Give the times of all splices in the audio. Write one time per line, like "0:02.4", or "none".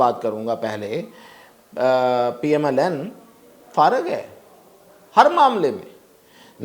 none